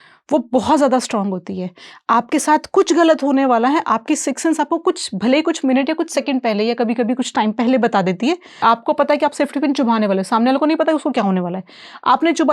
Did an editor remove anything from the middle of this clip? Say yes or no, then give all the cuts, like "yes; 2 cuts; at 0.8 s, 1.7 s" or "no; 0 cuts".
yes; 1 cut; at 8.6 s